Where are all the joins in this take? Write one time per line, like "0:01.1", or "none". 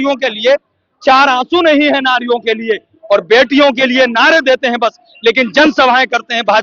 none